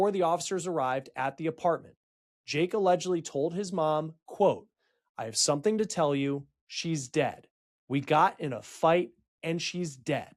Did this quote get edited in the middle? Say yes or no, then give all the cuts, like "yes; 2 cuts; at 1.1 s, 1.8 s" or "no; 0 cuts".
no; 0 cuts